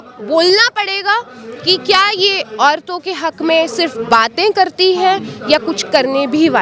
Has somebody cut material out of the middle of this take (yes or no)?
no